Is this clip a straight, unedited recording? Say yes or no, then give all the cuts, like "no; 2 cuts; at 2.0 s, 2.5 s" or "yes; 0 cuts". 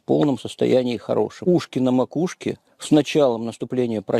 no; 1 cut; at 1.4 s